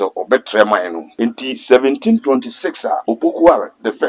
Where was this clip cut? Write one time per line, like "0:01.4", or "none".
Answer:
0:01.0
0:03.0